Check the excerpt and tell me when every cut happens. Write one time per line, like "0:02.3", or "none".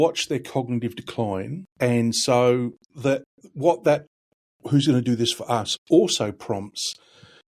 0:01.6
0:02.8